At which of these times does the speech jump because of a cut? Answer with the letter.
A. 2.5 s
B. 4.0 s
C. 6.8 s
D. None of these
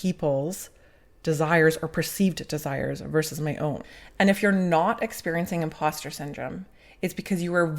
B